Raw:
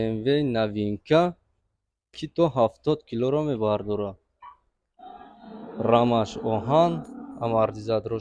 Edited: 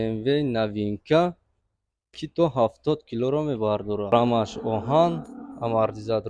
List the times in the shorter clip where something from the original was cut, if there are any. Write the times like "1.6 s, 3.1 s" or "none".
4.1 s